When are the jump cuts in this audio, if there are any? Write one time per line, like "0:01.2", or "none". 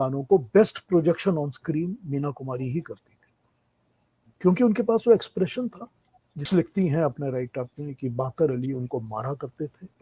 0:06.5

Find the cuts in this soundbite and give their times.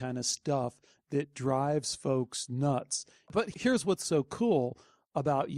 0:03.5

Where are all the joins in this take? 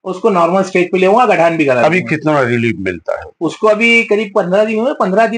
none

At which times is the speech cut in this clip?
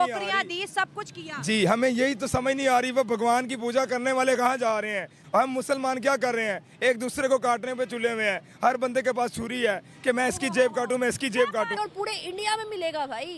0:05.2
0:11.7

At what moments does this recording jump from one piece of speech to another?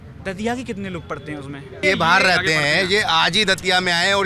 0:01.8

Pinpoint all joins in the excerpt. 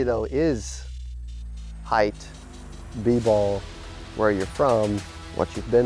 none

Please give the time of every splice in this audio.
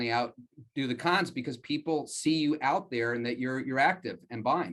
none

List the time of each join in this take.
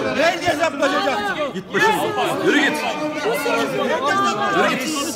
none

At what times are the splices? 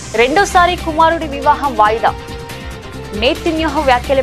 none

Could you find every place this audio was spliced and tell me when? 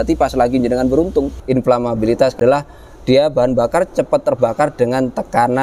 0:01.4
0:02.3

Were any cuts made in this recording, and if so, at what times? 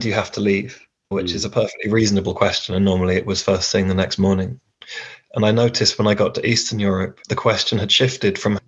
0:01.1
0:07.2

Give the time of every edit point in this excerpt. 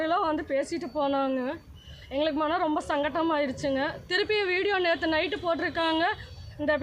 none

